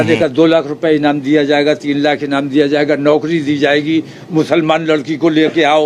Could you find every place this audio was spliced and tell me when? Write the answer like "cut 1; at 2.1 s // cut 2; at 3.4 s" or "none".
none